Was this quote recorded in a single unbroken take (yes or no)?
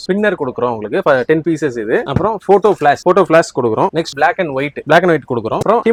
yes